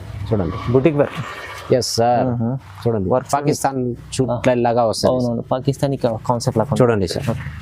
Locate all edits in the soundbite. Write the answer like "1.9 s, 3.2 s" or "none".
none